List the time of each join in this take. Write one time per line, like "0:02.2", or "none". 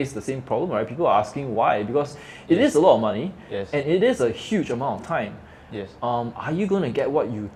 none

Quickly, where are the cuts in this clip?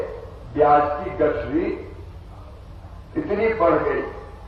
none

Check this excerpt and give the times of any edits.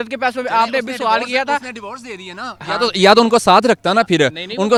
none

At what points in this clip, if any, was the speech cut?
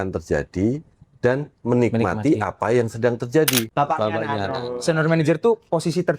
0:03.7

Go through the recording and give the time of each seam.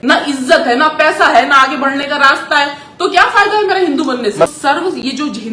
0:04.5

